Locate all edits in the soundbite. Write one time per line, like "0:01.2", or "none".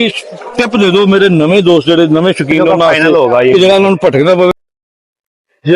0:04.5